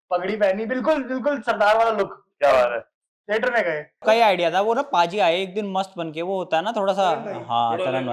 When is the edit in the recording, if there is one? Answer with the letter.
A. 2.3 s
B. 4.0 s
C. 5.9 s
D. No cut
B